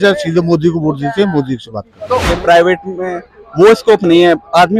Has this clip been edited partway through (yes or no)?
yes